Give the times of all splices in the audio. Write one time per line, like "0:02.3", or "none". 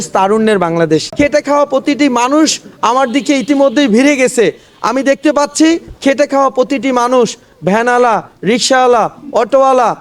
0:01.1